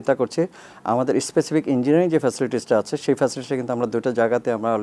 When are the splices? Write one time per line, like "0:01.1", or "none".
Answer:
none